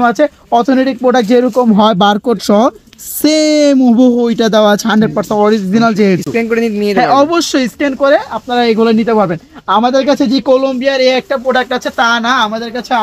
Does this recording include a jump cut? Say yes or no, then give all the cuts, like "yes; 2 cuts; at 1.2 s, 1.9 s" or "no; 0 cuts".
no; 0 cuts